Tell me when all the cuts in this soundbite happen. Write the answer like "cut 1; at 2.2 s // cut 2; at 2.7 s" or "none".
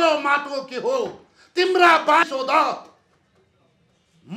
cut 1; at 2.3 s